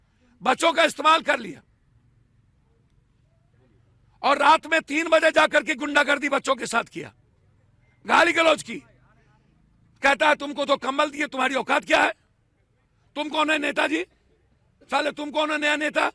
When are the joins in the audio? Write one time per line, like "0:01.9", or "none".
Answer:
none

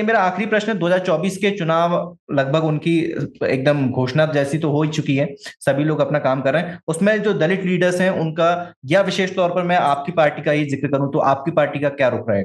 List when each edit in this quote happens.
none

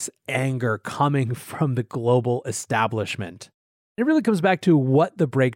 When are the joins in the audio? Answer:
0:04.0

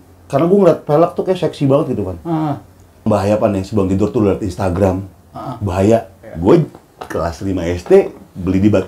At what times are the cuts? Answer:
0:03.1
0:06.2

